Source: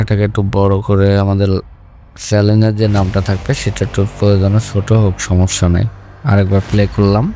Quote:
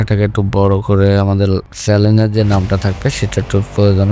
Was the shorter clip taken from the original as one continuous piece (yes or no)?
no